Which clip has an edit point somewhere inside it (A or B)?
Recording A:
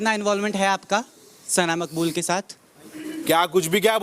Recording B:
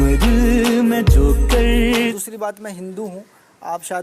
B